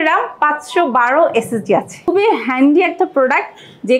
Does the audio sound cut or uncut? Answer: cut